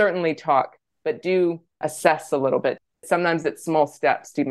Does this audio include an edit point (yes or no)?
yes